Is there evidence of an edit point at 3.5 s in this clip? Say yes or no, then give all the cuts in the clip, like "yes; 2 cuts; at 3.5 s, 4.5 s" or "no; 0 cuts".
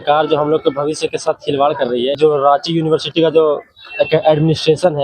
no; 1 cut; at 2.2 s